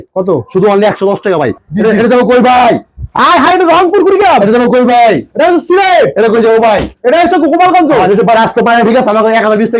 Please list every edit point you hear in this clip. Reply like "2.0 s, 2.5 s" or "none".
1.6 s